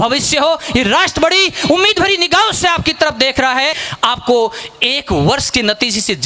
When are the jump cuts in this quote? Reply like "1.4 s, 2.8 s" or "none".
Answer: 3.8 s

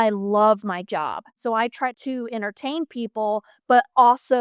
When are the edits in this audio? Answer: 1.3 s

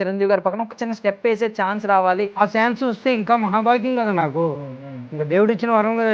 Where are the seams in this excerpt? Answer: 2.3 s

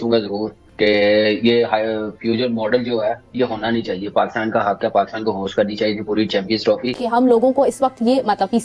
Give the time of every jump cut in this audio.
7.0 s

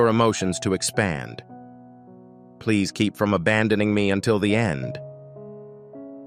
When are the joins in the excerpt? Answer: none

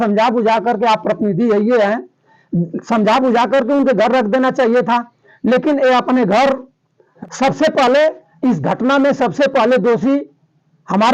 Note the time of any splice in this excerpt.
7.1 s

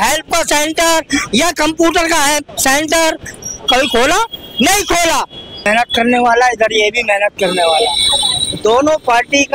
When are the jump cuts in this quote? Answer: 5.7 s

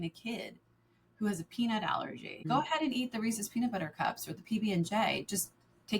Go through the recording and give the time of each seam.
2.4 s

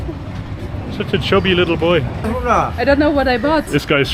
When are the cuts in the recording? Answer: 2.3 s

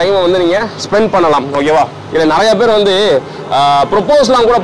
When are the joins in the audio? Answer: 2.0 s

